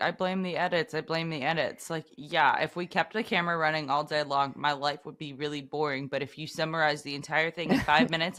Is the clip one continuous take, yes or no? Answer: yes